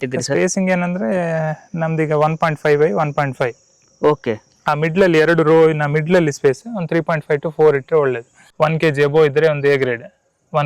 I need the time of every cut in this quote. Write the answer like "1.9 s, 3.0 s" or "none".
8.4 s